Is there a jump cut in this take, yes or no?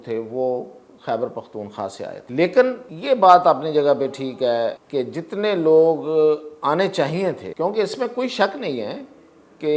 yes